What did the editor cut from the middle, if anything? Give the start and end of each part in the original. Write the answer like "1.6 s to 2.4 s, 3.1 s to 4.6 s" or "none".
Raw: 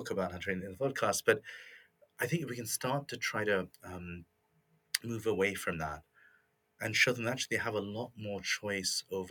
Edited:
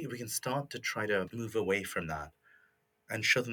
3.7 s to 5.0 s